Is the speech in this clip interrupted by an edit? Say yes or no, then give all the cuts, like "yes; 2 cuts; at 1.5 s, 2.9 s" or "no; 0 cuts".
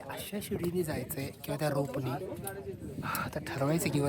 no; 0 cuts